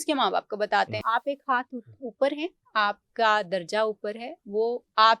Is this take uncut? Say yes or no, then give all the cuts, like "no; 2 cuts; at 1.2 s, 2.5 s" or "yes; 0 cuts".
no; 1 cut; at 1.0 s